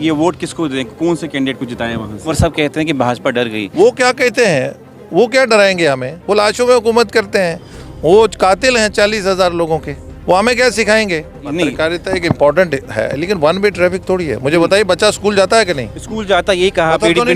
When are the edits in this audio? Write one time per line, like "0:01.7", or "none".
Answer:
0:02.3
0:11.4